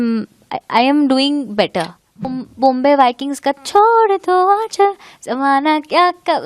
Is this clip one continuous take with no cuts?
no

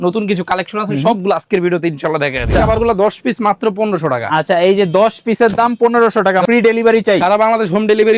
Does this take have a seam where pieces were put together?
yes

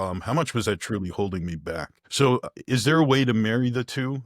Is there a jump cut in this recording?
yes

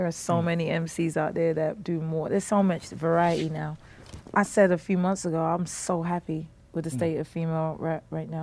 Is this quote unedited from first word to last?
yes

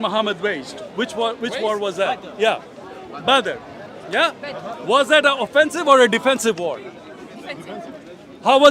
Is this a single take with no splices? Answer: no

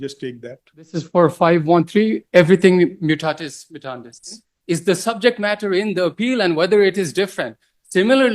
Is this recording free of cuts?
no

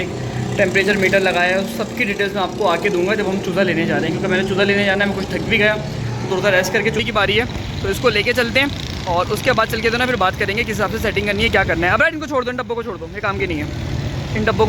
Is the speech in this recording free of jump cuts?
no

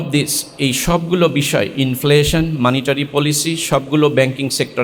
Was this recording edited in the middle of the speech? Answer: no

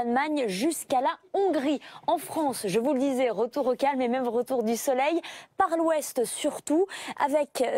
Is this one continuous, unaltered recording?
no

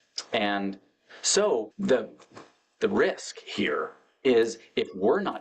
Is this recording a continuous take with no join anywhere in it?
no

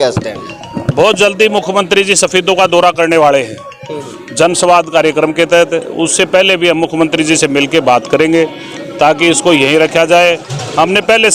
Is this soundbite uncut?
yes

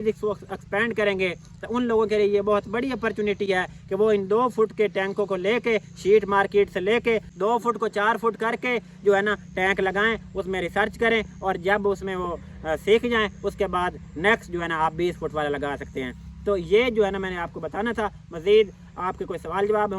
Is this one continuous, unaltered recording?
yes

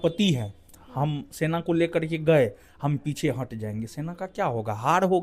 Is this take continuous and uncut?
yes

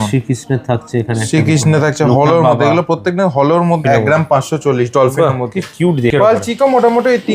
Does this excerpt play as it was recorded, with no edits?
no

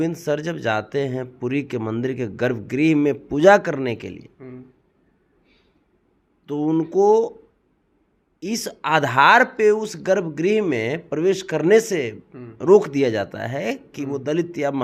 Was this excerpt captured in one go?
yes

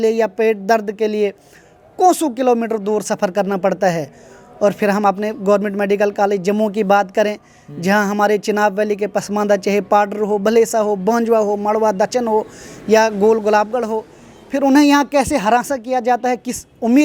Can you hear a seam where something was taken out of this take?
no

